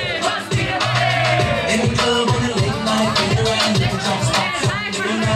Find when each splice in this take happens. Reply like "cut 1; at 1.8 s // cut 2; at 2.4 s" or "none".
none